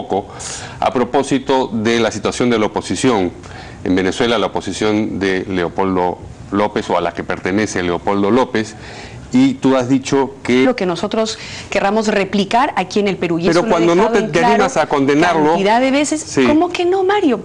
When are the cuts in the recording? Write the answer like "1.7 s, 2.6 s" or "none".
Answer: none

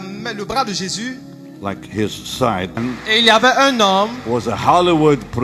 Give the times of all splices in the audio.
2.8 s

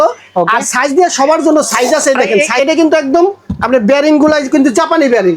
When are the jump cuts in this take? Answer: 2.5 s

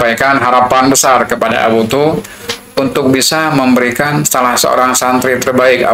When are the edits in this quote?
none

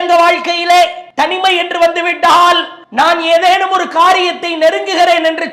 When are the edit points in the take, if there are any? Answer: 1.0 s, 2.8 s

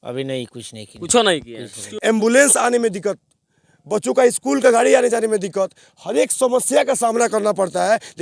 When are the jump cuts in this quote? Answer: 1.8 s

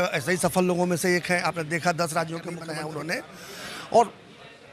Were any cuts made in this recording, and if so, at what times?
2.7 s

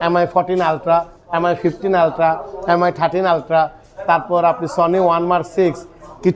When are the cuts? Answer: none

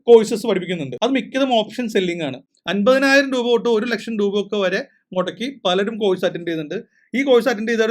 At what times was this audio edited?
2.4 s

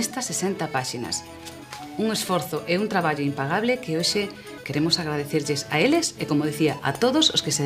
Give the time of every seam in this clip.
4.1 s

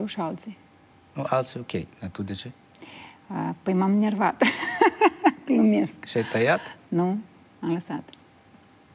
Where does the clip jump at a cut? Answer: none

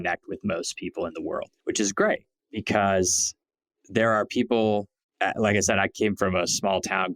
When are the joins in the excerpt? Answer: 1.5 s

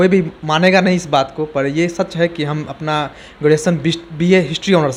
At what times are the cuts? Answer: none

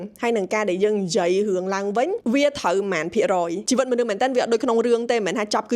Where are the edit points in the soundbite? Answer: 3.6 s

